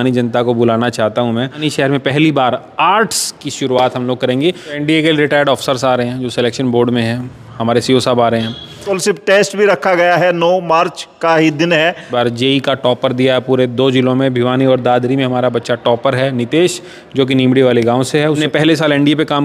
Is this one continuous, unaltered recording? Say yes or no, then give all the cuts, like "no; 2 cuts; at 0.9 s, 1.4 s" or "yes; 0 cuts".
no; 5 cuts; at 1.6 s, 4.8 s, 8.8 s, 12.1 s, 18.4 s